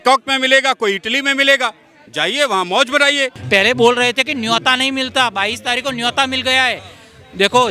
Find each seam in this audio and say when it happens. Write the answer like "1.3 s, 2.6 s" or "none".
3.4 s